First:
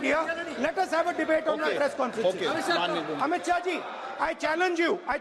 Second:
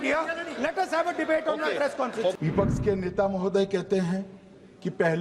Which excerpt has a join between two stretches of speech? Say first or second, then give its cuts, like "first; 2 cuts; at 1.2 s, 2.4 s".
second; 1 cut; at 2.4 s